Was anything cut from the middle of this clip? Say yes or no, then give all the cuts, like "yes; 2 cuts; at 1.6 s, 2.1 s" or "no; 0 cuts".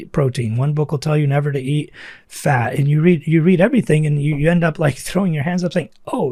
no; 0 cuts